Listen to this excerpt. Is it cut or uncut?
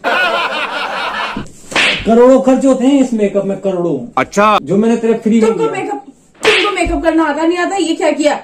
cut